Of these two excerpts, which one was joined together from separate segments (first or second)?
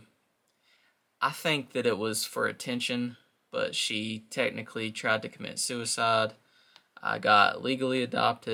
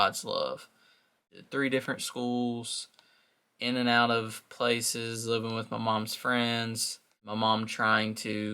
second